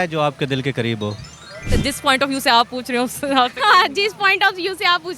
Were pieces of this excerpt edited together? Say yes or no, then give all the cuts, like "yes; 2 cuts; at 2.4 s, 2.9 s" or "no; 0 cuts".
yes; 1 cut; at 1.7 s